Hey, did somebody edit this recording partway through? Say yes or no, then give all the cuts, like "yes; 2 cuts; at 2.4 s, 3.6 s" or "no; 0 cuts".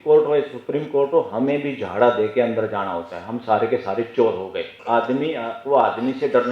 yes; 1 cut; at 4.7 s